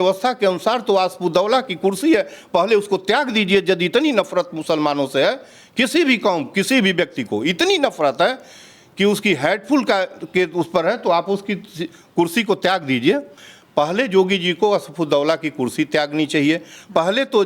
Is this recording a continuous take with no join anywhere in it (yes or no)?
yes